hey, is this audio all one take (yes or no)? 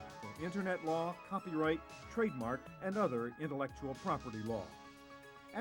yes